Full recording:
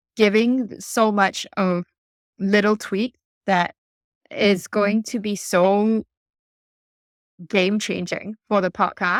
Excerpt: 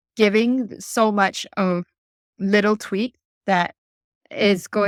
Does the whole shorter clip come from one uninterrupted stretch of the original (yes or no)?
yes